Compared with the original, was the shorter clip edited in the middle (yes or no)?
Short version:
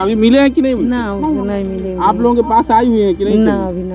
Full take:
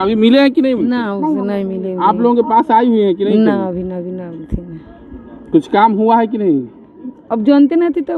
no